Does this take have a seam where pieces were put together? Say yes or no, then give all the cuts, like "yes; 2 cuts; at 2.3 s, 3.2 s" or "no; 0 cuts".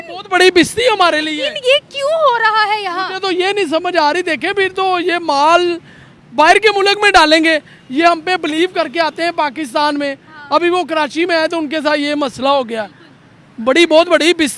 no; 0 cuts